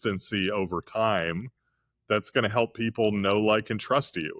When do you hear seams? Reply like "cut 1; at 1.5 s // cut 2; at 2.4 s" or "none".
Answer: none